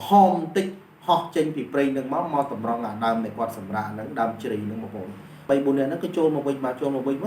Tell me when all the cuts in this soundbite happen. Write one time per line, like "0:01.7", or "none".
0:05.4